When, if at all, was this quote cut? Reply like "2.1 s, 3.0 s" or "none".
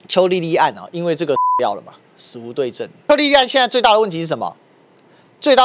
3.0 s